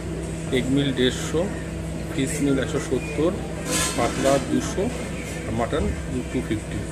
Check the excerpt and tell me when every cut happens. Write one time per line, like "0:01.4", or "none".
none

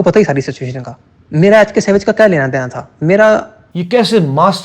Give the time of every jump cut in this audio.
0:03.7

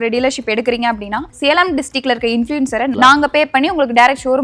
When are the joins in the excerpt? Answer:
0:02.9

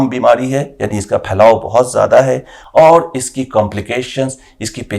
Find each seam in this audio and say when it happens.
0:02.5

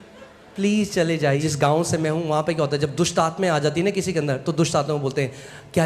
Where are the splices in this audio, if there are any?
0:01.4

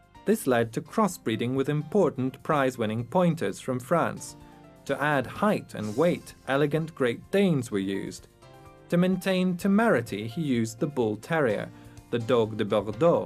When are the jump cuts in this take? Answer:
none

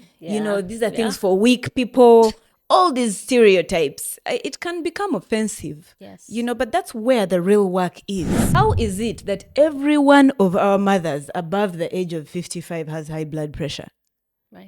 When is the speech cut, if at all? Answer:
0:08.4

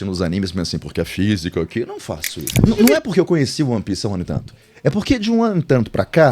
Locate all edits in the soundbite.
0:02.7

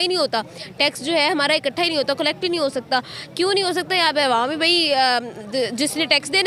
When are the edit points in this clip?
none

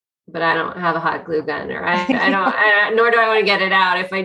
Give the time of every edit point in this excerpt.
none

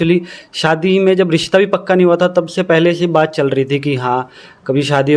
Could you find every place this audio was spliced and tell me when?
none

